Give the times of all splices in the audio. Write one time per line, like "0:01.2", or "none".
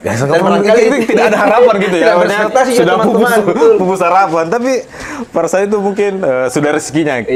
none